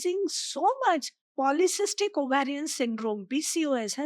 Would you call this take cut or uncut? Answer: cut